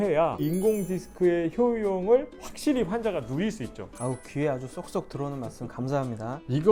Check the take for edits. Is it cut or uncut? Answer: uncut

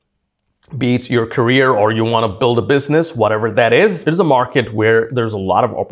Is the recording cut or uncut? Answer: cut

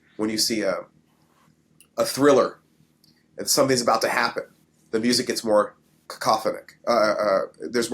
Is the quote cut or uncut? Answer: uncut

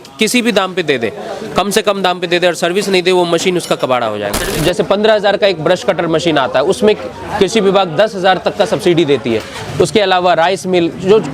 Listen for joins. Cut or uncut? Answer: cut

